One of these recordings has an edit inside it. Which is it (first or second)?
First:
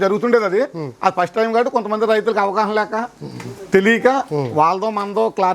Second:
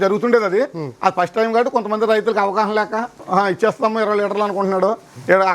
second